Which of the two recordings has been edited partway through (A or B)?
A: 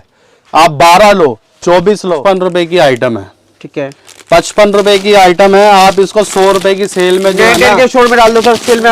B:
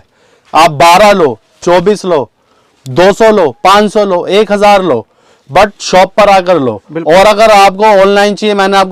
A